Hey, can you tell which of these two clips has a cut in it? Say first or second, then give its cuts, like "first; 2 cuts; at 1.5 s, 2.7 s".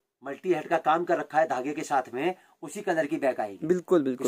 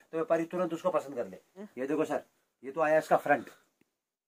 second; 1 cut; at 1.7 s